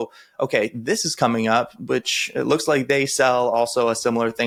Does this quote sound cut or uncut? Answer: uncut